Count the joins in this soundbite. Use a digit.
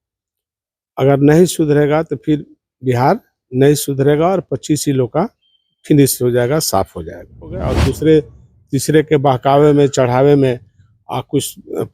1